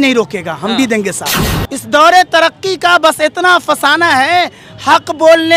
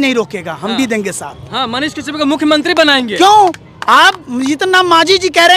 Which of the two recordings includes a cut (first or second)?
first